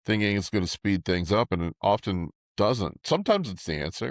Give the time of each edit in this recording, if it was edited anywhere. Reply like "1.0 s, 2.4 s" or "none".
2.4 s

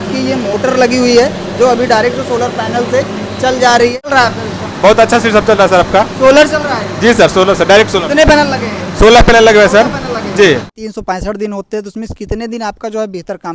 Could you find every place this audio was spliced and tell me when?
4.1 s, 10.8 s

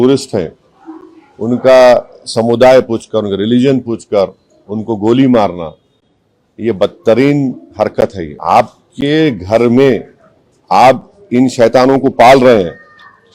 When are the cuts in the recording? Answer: 8.3 s

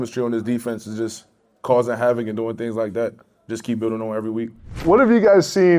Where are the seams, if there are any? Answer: 4.8 s

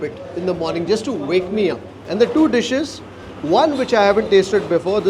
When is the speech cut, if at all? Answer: 2.0 s

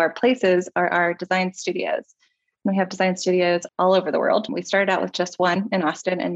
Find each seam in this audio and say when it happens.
3.7 s

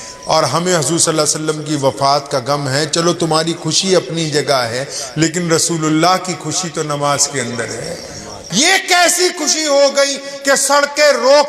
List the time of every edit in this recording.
8.4 s

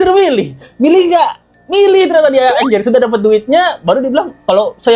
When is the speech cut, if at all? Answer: none

